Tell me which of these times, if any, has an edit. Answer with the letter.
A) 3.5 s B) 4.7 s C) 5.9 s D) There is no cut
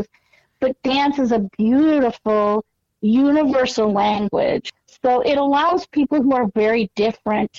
B